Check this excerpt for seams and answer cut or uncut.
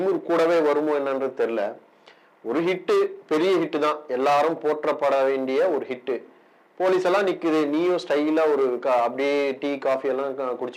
uncut